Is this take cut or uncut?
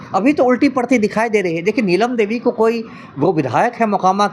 uncut